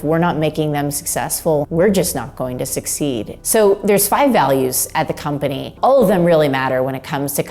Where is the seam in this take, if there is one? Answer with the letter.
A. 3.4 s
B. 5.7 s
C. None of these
C